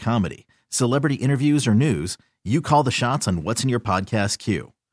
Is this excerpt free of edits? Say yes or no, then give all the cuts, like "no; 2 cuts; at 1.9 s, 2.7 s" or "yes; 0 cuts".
yes; 0 cuts